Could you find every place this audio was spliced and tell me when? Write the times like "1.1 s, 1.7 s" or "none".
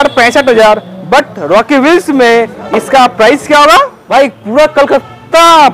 4.0 s